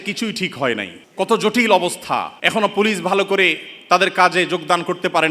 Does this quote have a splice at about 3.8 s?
no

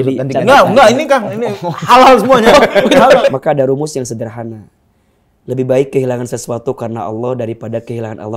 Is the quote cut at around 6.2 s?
no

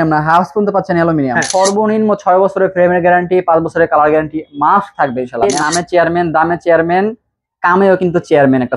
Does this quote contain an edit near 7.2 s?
no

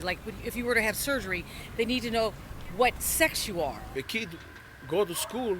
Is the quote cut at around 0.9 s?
no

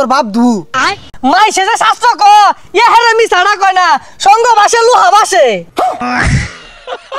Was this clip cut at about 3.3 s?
no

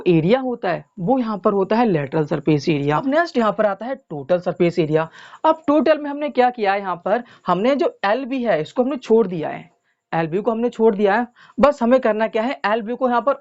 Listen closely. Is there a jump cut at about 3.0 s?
yes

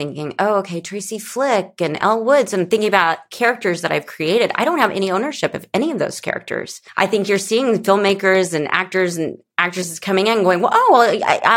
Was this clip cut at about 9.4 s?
no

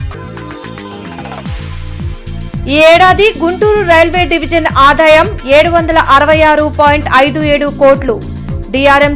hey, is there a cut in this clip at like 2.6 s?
no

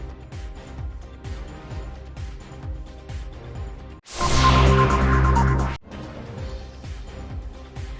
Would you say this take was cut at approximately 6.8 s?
yes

